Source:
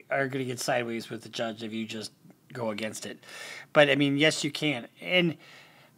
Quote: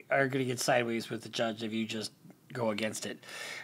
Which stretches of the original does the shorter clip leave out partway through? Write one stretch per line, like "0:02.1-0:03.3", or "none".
none